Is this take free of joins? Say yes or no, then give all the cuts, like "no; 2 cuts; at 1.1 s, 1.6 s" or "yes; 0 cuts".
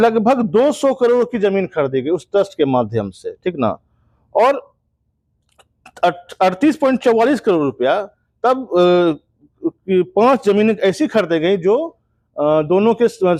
yes; 0 cuts